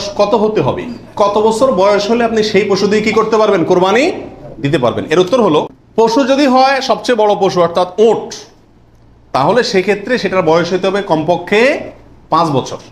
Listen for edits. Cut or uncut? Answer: uncut